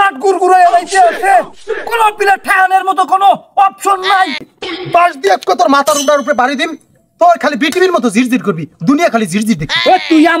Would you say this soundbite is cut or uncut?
cut